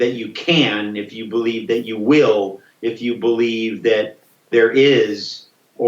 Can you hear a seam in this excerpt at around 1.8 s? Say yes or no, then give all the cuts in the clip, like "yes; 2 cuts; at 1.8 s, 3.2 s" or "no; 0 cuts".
no; 1 cut; at 4.5 s